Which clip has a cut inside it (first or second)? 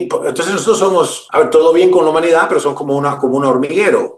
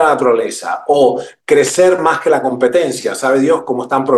first